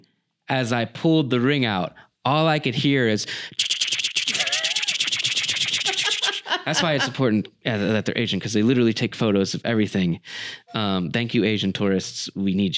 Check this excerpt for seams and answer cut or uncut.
uncut